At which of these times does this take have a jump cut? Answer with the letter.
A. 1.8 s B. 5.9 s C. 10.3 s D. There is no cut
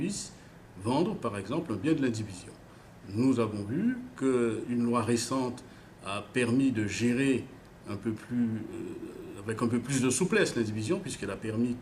C